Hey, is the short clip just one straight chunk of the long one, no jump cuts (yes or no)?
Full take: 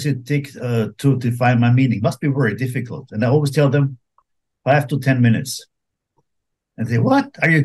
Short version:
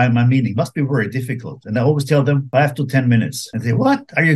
no